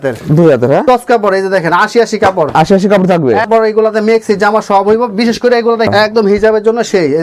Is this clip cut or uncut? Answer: cut